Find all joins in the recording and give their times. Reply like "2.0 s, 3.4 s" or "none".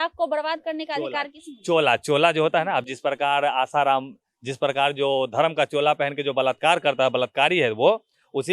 none